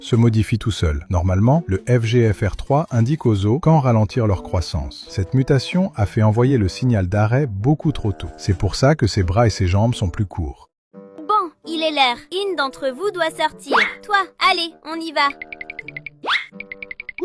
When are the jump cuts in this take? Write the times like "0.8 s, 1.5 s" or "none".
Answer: 10.8 s

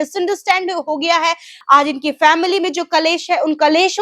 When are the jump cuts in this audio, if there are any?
1.5 s

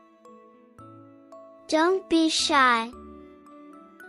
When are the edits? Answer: 2.9 s

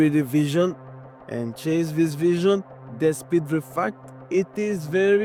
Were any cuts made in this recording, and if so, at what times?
none

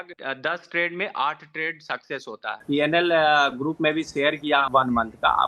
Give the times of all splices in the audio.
2.6 s, 4.7 s

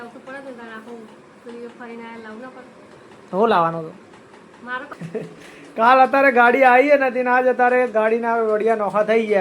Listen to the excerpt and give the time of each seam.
4.9 s

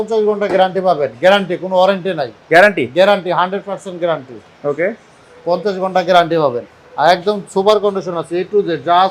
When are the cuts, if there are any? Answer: none

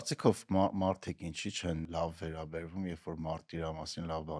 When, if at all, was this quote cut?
1.9 s

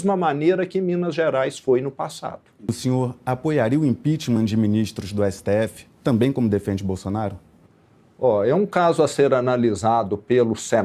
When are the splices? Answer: none

